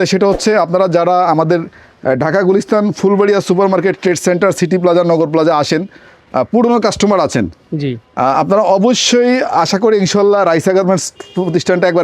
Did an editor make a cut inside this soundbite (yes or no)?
no